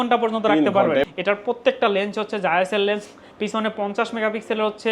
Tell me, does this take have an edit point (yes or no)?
yes